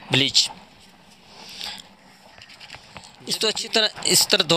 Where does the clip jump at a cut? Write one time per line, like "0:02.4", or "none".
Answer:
0:02.8